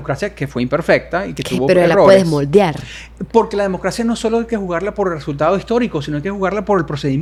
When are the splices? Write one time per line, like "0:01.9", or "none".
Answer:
none